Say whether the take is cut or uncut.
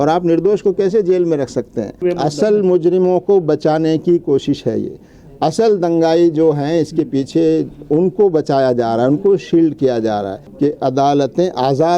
cut